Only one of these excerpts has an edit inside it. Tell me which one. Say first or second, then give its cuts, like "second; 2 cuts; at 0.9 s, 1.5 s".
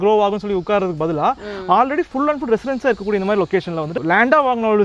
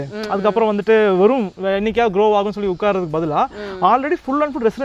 first; 1 cut; at 3.9 s